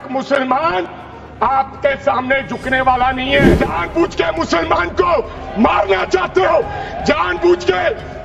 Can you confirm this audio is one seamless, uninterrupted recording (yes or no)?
no